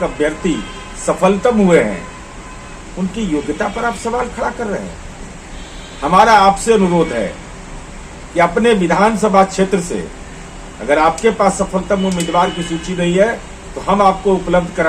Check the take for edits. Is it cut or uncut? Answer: uncut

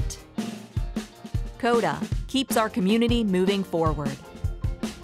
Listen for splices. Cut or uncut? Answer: uncut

